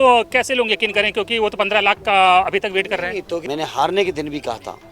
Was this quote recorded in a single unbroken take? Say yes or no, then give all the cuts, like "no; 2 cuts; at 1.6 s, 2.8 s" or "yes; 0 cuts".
no; 1 cut; at 3.4 s